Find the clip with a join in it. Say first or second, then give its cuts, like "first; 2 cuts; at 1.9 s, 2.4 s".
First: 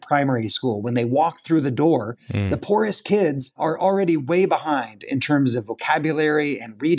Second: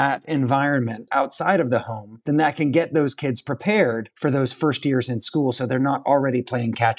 second; 1 cut; at 1.1 s